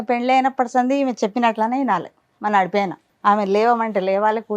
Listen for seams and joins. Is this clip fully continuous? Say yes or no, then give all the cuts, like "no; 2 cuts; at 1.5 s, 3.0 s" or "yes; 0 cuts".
no; 1 cut; at 3.0 s